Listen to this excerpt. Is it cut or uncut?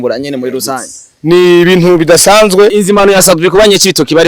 cut